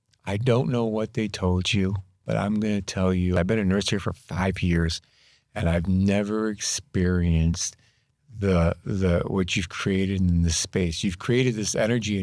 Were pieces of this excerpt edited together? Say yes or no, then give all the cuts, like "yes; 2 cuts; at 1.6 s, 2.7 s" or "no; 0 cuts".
yes; 1 cut; at 3.4 s